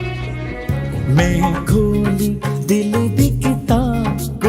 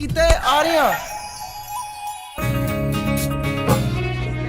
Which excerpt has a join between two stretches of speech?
second; 1 cut; at 2.4 s

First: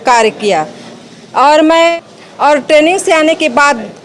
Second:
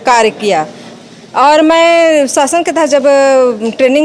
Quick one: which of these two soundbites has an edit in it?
first; 1 cut; at 1.9 s

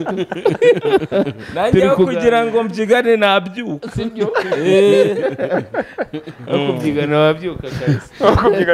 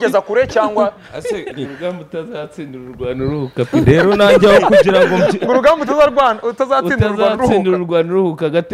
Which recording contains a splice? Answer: second; 1 cut; at 1.5 s

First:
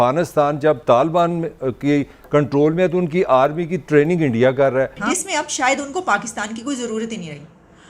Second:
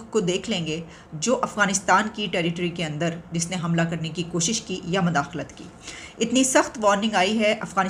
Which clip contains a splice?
first; 1 cut; at 5.0 s

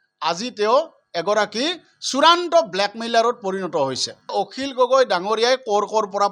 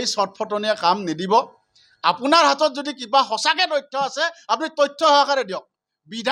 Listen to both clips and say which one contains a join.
first; 1 cut; at 4.3 s

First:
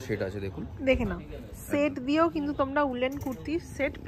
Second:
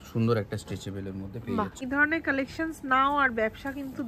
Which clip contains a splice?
second; 1 cut; at 1.8 s

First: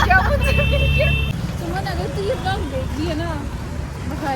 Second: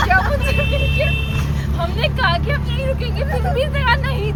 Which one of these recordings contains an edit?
first; 1 cut; at 1.3 s

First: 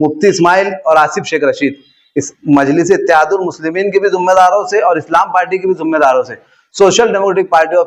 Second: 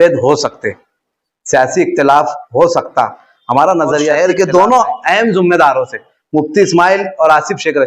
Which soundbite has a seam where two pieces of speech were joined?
second; 1 cut; at 4.1 s

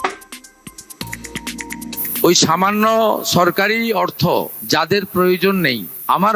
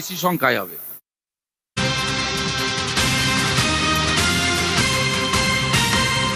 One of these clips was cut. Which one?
second; 1 cut; at 1.8 s

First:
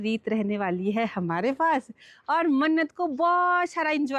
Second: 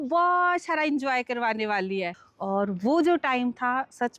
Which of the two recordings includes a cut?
second; 1 cut; at 2.1 s

